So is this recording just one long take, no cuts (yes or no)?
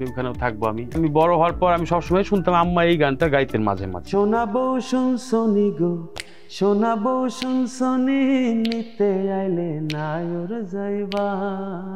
no